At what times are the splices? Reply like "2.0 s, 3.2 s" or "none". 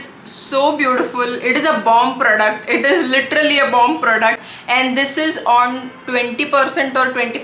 4.4 s